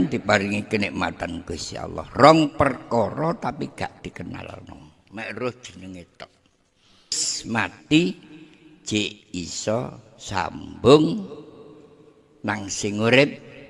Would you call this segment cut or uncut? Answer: cut